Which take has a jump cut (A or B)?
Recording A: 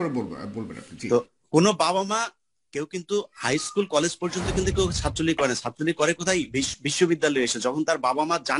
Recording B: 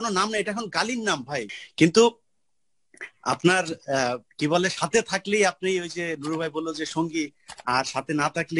B